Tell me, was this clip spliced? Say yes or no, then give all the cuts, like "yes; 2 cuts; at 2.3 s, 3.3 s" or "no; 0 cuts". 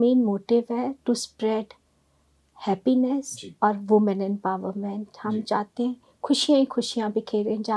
no; 0 cuts